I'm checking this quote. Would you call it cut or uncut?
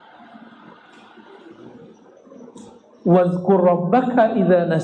uncut